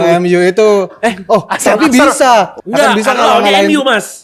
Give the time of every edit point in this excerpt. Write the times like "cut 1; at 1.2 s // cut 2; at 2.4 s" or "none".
cut 1; at 2.6 s